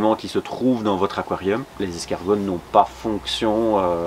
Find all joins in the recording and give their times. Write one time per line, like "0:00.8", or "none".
0:01.7